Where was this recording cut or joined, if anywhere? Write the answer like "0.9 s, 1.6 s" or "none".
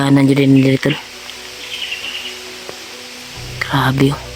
none

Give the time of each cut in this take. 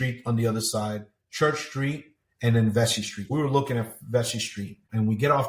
3.2 s

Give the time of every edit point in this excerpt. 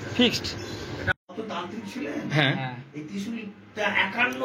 1.1 s

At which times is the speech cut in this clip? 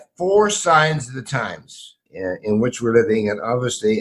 2.0 s

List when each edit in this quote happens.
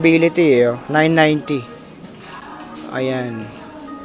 none

